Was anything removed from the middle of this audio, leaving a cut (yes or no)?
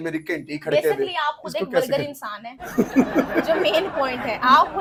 no